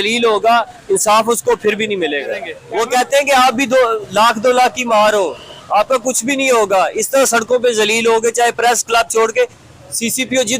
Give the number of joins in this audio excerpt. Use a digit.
1